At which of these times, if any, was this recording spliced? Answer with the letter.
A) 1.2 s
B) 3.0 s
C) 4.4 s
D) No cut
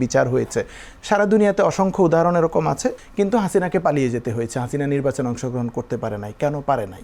B